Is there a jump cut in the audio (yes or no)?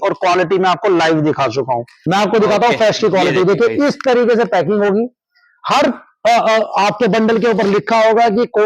yes